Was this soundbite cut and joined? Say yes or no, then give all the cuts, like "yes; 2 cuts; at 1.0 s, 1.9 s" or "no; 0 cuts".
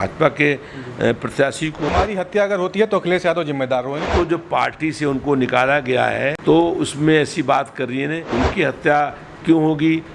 yes; 4 cuts; at 1.9 s, 4.1 s, 6.4 s, 8.2 s